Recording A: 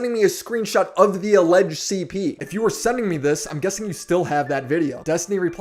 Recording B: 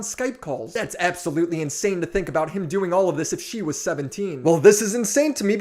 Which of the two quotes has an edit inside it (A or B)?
A